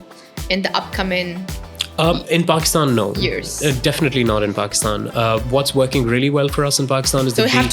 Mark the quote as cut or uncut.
uncut